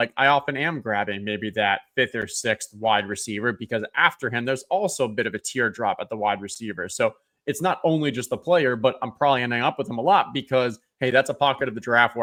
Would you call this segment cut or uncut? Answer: uncut